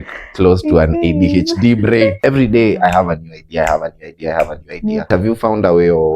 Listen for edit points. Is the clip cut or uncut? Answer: cut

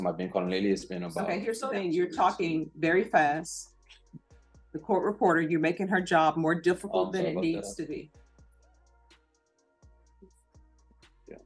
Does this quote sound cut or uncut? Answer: uncut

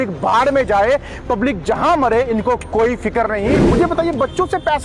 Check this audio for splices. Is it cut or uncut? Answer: cut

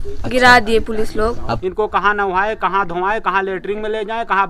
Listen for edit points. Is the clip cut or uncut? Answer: cut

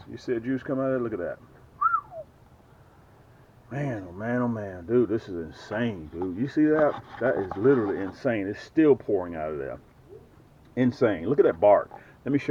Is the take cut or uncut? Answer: uncut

